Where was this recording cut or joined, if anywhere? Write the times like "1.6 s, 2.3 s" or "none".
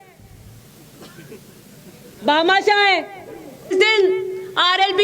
3.7 s